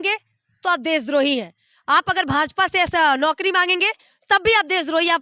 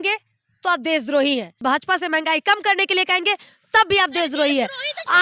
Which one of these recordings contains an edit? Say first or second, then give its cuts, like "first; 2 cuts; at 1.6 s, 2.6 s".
second; 1 cut; at 1.6 s